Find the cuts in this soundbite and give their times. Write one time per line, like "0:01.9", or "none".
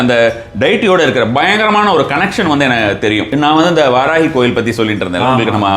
0:03.3